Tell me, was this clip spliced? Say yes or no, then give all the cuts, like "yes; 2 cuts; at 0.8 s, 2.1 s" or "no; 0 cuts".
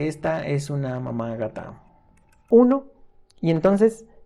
yes; 1 cut; at 2.4 s